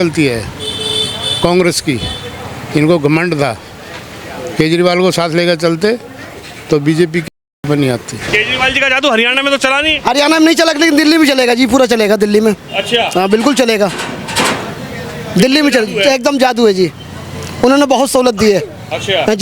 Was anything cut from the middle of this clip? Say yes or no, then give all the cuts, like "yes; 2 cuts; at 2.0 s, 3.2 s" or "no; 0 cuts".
yes; 1 cut; at 8.2 s